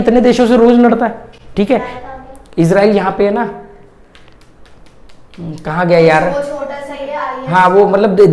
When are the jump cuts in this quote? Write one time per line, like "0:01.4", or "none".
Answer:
none